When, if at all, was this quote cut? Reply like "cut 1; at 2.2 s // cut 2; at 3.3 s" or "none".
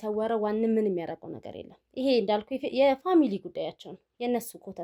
none